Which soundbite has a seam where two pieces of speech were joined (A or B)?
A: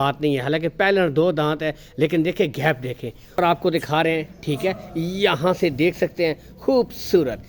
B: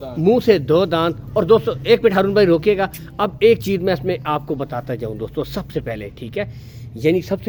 A